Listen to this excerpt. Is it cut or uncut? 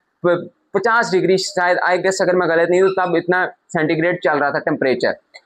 uncut